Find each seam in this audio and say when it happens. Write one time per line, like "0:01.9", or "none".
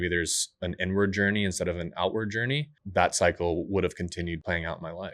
0:02.8
0:04.4